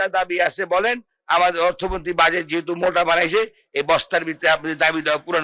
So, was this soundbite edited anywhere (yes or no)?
no